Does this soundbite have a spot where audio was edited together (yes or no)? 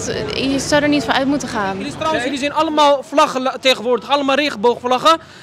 yes